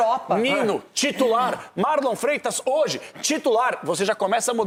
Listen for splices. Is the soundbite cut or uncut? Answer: uncut